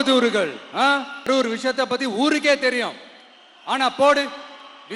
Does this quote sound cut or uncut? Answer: cut